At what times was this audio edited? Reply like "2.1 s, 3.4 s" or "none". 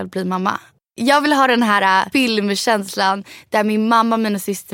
0.9 s, 2.1 s